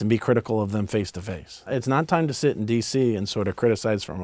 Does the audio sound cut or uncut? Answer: cut